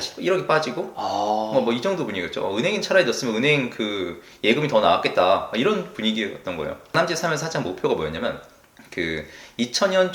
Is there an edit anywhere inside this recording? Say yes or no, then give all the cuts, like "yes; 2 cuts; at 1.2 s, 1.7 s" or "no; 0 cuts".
yes; 1 cut; at 6.9 s